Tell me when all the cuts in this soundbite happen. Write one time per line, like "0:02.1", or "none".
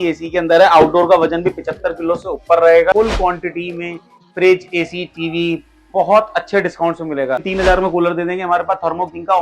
0:02.9
0:07.5